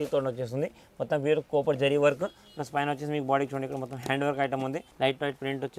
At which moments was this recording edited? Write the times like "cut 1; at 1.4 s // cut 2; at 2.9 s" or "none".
cut 1; at 4.9 s